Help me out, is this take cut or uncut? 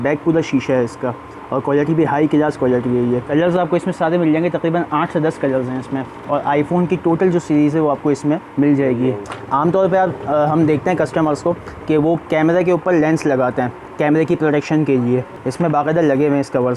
cut